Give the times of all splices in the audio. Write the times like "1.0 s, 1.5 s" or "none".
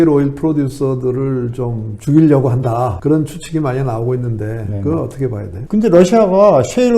3.0 s, 5.5 s

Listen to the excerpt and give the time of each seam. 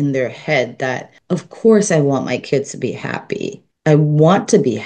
1.1 s, 3.6 s

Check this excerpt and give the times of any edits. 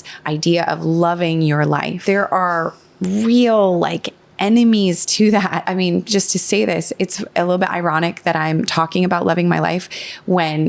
1.9 s, 5.6 s

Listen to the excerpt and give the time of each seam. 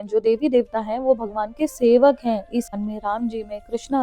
2.7 s

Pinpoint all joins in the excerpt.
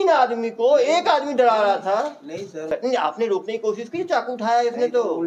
2.6 s

